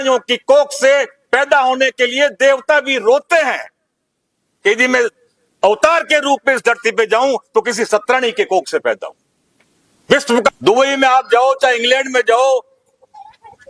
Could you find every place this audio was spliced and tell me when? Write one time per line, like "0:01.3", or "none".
0:10.5